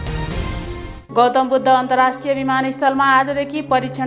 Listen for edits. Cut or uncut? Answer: uncut